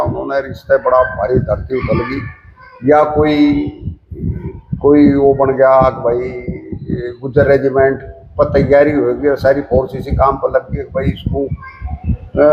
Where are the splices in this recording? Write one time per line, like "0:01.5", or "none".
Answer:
none